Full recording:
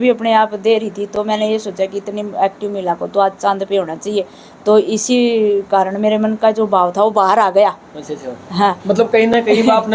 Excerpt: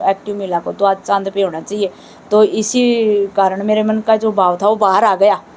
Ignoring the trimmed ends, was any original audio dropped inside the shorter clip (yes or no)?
no